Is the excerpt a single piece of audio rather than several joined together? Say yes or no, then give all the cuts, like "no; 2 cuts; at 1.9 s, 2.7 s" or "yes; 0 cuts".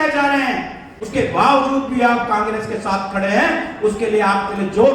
no; 1 cut; at 1.0 s